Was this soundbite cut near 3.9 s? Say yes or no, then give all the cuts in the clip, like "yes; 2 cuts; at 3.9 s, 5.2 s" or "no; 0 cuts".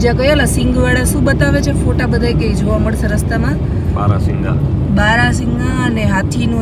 no; 0 cuts